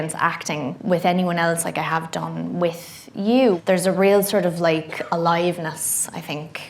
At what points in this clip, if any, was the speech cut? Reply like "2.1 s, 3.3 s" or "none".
3.6 s